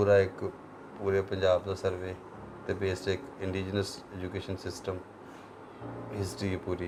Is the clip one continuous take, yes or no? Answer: yes